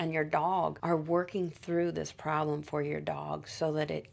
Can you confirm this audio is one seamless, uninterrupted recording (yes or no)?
yes